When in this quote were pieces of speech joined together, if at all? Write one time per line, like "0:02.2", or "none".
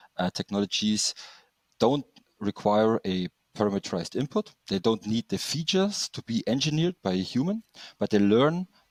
none